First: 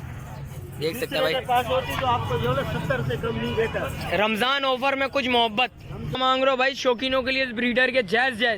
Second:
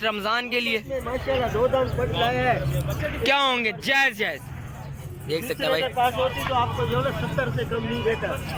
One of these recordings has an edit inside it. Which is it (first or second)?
first